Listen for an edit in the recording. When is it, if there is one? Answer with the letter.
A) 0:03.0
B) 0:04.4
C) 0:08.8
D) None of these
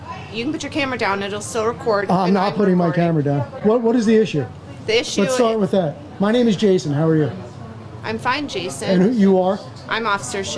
A